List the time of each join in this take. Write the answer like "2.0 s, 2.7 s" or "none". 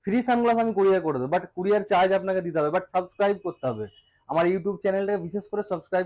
none